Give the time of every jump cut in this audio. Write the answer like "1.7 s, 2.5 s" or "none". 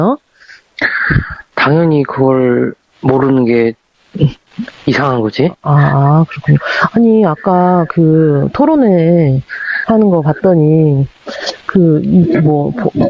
none